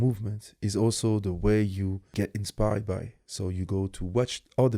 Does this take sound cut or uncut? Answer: cut